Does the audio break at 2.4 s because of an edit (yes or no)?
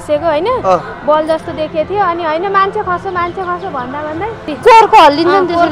no